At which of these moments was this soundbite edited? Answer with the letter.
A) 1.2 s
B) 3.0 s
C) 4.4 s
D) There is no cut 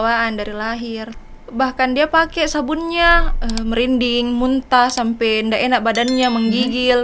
A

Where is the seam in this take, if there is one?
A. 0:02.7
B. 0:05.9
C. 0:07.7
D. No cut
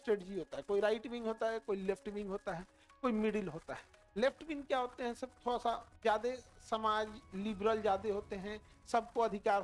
B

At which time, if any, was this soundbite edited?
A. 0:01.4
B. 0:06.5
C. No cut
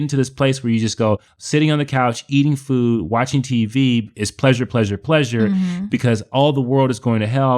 A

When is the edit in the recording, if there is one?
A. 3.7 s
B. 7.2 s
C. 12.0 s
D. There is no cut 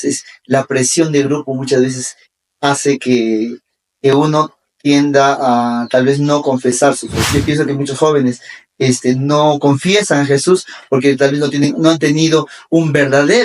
B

